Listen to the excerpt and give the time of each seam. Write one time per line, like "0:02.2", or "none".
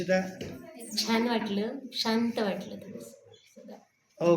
none